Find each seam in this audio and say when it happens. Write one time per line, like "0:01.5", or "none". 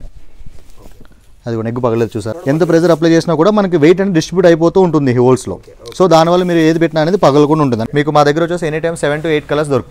0:02.3
0:07.8